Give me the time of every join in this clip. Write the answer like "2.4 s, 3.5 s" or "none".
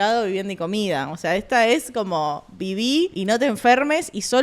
3.2 s